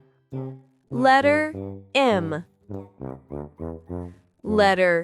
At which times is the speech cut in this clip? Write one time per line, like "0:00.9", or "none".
0:00.8
0:02.4
0:04.3